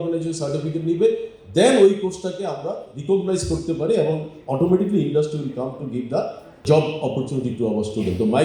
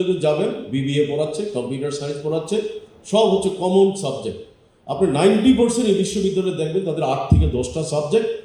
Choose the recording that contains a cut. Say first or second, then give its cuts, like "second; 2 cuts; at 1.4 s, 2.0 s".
first; 1 cut; at 6.6 s